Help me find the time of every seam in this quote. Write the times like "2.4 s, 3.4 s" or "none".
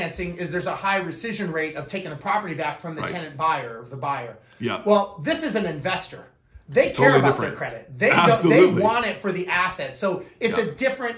none